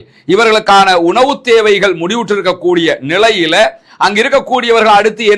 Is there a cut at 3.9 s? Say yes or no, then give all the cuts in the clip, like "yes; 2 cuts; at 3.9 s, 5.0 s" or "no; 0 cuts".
no; 0 cuts